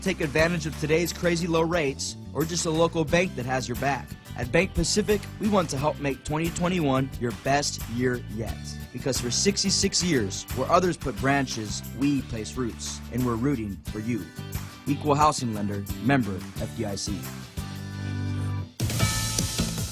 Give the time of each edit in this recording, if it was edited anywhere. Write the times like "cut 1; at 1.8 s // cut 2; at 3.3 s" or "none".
cut 1; at 18.7 s